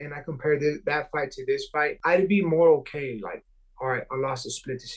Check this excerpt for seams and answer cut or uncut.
cut